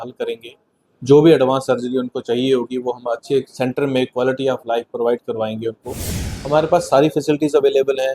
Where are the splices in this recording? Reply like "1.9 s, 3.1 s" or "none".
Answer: 6.2 s